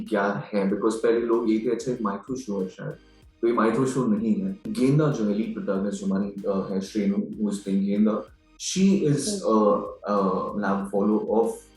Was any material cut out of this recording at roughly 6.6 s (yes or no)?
no